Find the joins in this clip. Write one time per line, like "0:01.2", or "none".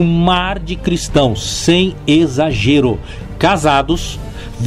0:03.1